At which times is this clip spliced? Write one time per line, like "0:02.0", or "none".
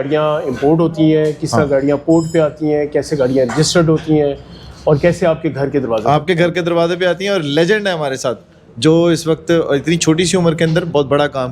none